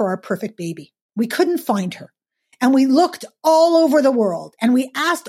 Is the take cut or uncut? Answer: uncut